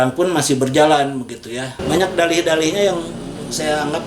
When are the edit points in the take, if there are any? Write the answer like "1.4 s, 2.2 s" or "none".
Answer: 1.8 s